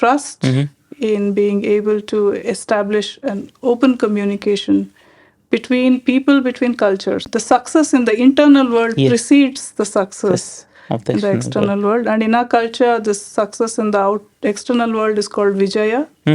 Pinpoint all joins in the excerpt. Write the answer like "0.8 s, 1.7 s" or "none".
7.3 s